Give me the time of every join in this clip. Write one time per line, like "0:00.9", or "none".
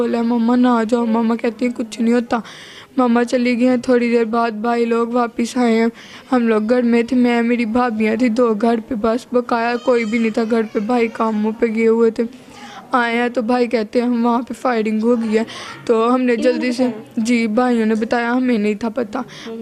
none